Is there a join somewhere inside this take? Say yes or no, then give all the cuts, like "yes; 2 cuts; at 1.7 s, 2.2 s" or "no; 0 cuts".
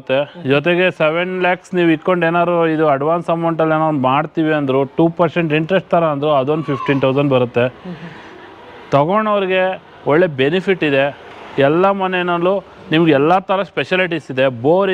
no; 0 cuts